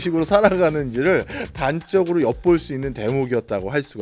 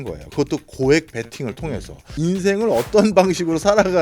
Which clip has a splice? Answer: second; 1 cut; at 2.0 s

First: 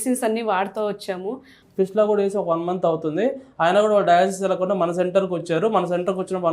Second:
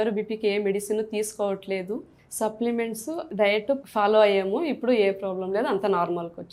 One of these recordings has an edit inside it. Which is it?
first; 1 cut; at 1.5 s

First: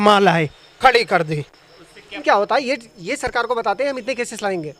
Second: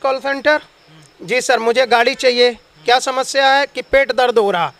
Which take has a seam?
first; 1 cut; at 2.2 s

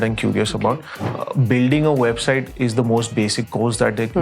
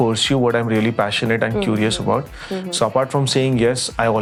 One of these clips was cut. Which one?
first; 1 cut; at 1.0 s

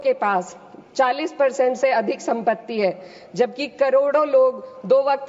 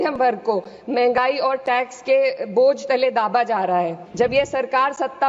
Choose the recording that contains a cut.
second; 1 cut; at 4.0 s

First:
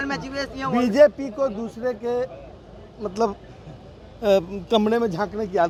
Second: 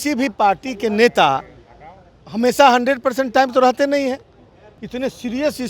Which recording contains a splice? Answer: second; 1 cut; at 4.7 s

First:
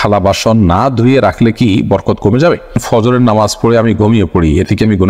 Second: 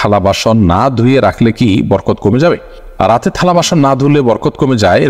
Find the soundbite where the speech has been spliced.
first; 1 cut; at 2.8 s

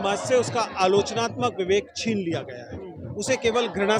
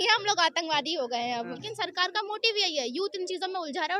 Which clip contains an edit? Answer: second; 1 cut; at 1.7 s

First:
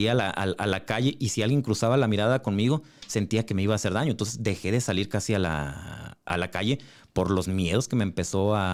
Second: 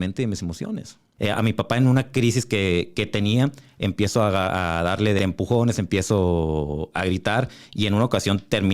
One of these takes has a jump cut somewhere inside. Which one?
second; 2 cuts; at 1.0 s, 5.2 s

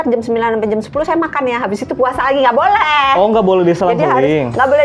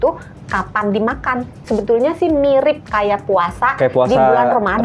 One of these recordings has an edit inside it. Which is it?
second; 1 cut; at 1.6 s

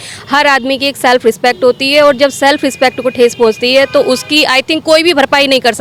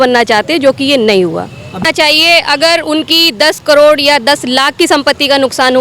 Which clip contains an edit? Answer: second; 1 cut; at 1.9 s

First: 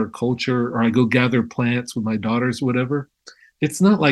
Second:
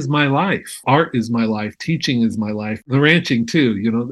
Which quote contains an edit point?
second; 2 cuts; at 0.8 s, 2.9 s

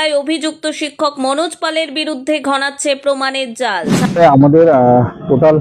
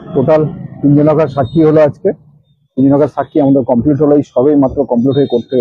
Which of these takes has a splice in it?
first; 1 cut; at 4.0 s

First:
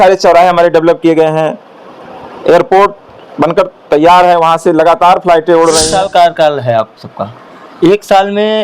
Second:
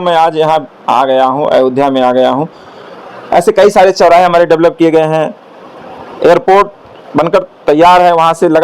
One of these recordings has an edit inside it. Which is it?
first; 1 cut; at 5.9 s

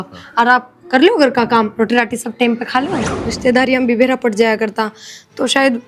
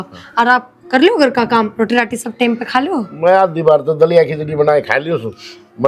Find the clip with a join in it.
first; 1 cut; at 3.1 s

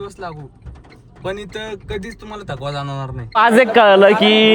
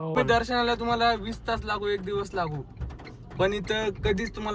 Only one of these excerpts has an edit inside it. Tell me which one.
first; 1 cut; at 3.4 s

